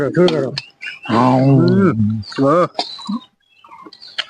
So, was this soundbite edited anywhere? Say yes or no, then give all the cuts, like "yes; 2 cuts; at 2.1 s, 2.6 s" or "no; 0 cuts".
no; 0 cuts